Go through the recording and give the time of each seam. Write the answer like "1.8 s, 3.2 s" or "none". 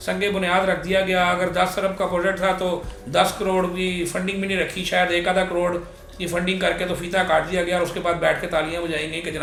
none